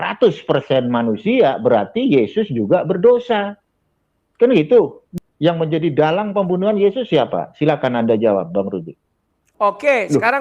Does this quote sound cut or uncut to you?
cut